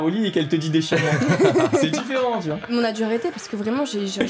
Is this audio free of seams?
no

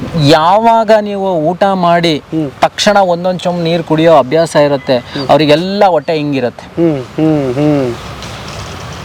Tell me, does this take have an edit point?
no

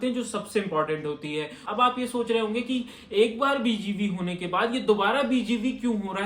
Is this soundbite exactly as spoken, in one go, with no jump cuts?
no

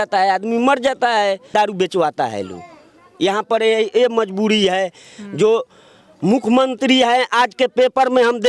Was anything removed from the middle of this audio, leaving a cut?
no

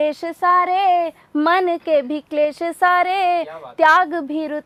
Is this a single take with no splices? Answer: yes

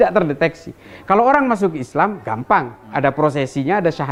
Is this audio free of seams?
yes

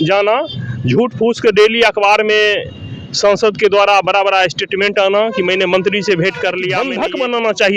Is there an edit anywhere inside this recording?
yes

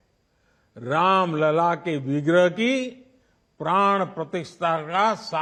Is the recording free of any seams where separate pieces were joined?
yes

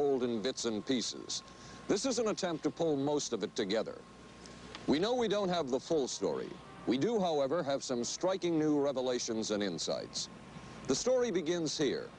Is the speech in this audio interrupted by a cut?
no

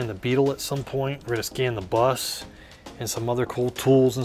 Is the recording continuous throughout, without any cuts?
no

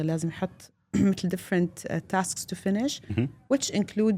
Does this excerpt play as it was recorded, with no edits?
yes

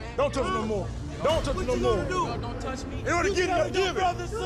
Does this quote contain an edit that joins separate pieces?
no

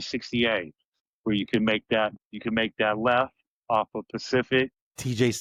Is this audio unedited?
yes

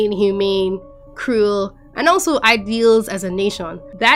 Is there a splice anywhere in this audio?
no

